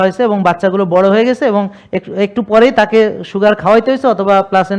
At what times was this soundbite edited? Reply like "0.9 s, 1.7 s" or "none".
none